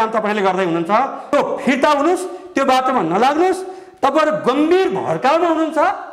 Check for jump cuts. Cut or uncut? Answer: cut